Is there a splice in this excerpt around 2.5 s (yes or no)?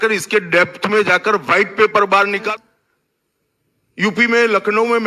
yes